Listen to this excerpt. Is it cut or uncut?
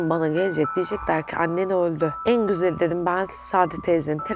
cut